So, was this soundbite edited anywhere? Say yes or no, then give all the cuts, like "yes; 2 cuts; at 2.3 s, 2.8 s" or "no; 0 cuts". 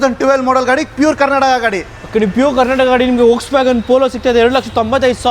no; 0 cuts